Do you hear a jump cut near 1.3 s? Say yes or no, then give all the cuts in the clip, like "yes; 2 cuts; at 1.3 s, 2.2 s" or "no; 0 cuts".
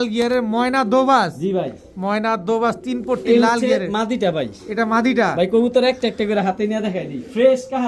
no; 0 cuts